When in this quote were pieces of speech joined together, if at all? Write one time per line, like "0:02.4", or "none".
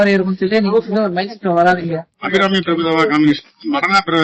0:02.1

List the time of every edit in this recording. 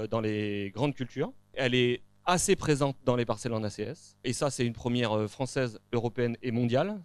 0:01.6
0:04.3

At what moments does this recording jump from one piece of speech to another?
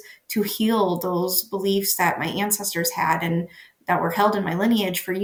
none

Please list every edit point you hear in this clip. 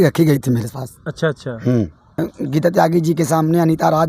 0:02.3

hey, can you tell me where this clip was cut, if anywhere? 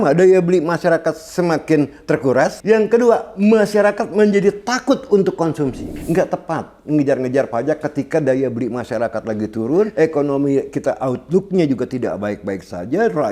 0:02.6
0:05.9
0:09.9

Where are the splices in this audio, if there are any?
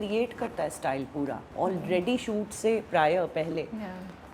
none

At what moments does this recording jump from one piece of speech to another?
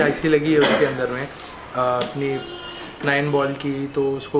none

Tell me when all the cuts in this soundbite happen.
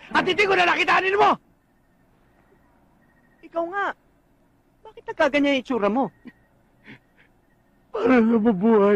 none

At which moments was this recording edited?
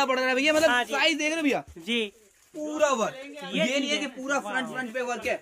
none

